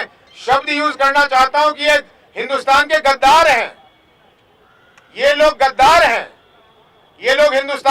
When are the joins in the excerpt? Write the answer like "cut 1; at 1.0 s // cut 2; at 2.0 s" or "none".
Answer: none

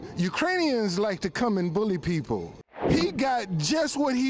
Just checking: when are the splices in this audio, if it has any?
cut 1; at 2.8 s

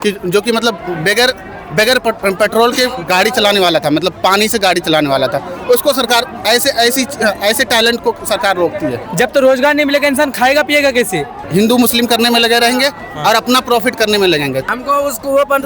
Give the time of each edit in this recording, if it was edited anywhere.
cut 1; at 9.0 s // cut 2; at 11.4 s // cut 3; at 14.7 s

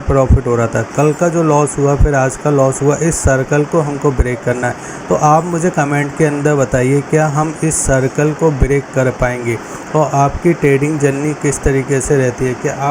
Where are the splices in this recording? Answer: none

